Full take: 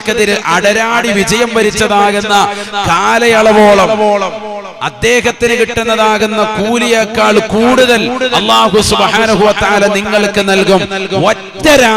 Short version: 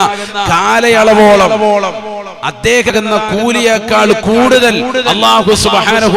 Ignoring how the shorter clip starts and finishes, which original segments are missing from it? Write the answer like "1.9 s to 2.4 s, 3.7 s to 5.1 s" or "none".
5.3 s to 6.2 s